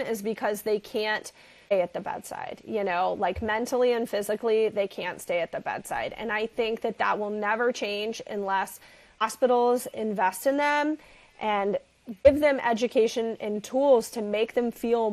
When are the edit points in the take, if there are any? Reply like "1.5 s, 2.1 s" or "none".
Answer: 1.7 s, 9.2 s, 12.2 s